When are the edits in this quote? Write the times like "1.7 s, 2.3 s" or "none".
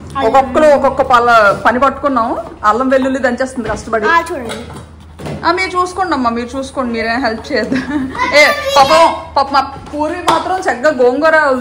none